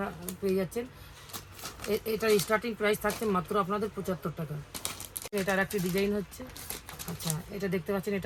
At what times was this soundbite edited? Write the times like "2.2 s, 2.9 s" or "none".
none